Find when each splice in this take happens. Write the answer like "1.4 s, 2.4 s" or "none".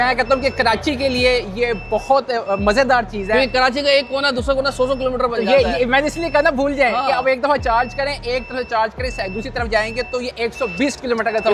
none